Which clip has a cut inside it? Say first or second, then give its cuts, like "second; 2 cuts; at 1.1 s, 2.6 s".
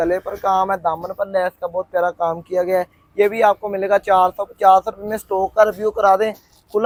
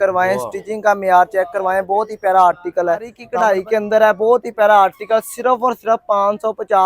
second; 1 cut; at 3.2 s